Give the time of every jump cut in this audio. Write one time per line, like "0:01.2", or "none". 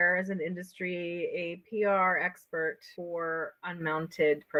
none

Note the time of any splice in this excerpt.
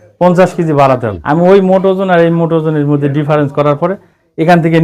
0:01.1

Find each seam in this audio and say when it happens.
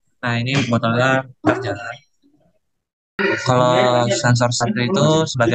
0:03.2

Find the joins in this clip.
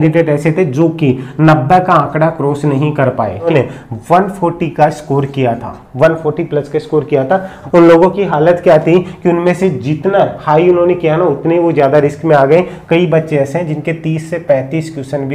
0:03.5
0:07.6

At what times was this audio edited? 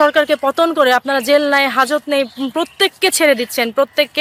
none

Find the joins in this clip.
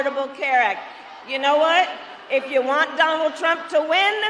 none

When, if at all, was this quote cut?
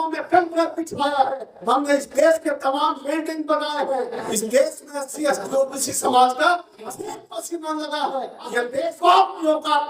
0:08.7

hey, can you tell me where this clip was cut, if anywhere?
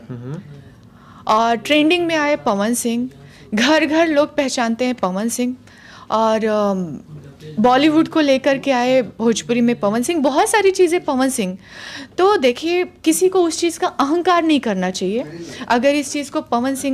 none

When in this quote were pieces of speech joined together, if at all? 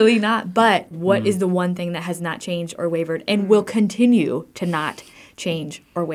0:00.9

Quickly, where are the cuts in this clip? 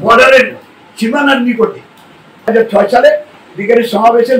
0:02.5

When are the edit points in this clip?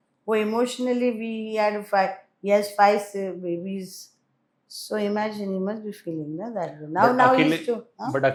none

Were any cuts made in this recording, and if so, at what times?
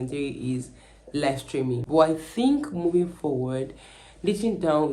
0:01.8

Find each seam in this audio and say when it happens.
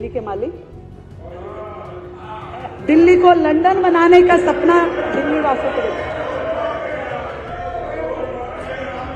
none

